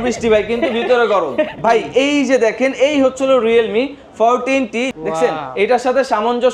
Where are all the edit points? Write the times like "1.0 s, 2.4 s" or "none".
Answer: 1.5 s, 4.9 s